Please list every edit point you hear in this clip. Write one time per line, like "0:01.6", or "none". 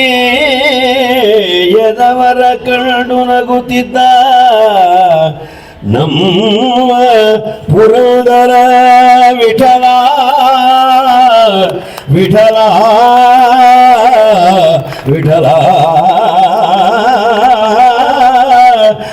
0:18.1